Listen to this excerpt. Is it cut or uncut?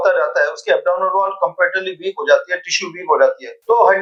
uncut